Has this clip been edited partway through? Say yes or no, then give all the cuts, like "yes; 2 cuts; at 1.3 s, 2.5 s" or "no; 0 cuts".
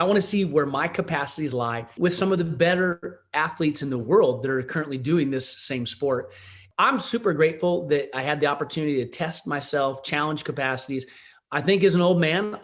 yes; 2 cuts; at 2.0 s, 6.6 s